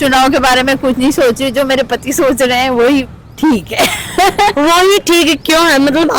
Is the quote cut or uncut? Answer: uncut